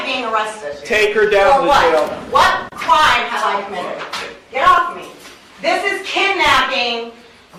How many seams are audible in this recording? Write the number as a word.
zero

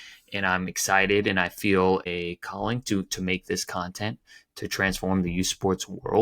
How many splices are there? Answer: one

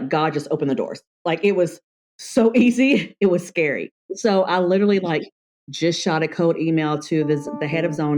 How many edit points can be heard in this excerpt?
one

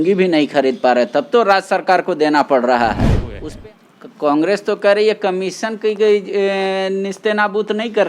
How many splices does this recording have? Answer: one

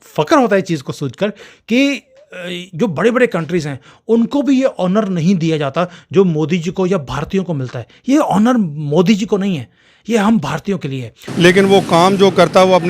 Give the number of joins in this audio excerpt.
one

